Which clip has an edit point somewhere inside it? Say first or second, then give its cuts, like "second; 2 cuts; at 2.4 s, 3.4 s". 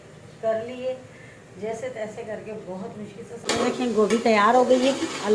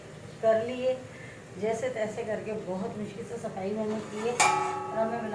first; 1 cut; at 3.3 s